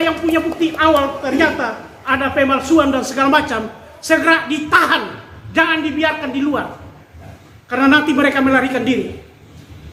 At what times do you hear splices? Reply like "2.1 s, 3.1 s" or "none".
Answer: none